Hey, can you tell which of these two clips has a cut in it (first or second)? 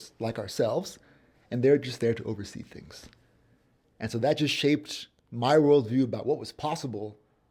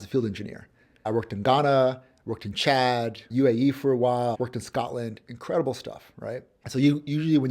second